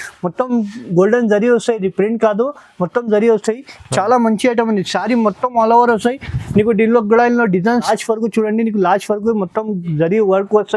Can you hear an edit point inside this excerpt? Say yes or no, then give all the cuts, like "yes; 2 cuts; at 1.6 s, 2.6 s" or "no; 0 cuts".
yes; 1 cut; at 7.9 s